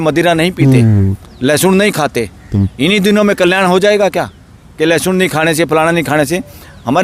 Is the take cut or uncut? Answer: uncut